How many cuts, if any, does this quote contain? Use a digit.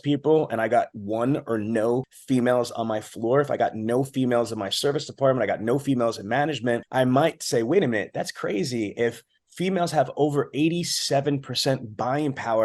2